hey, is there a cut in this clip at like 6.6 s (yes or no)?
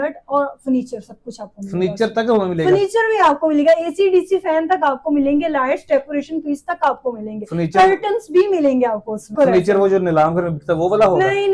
no